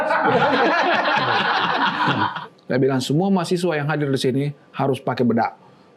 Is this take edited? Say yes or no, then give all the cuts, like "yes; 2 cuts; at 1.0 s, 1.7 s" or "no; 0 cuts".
yes; 1 cut; at 2.4 s